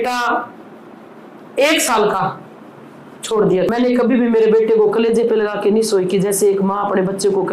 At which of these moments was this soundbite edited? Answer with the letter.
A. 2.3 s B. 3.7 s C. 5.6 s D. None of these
B